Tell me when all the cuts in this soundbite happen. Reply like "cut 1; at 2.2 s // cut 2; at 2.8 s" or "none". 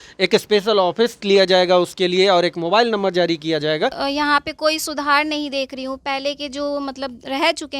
cut 1; at 4.0 s